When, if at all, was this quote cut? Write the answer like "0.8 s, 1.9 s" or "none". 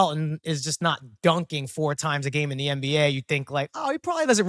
none